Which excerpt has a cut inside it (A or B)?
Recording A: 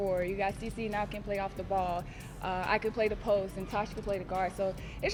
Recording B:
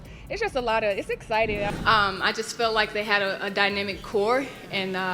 B